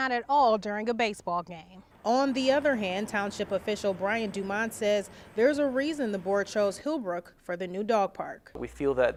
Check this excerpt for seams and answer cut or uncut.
uncut